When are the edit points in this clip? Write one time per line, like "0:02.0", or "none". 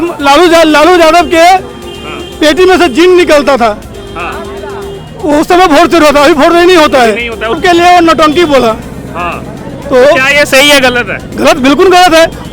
0:07.6